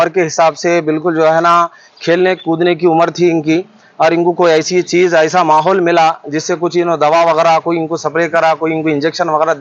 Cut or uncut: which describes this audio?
uncut